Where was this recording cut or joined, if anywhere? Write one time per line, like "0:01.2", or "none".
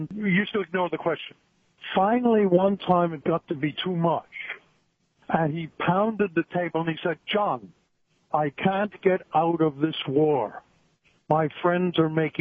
none